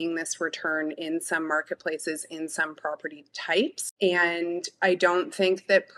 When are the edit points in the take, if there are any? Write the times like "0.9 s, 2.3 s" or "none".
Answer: 3.8 s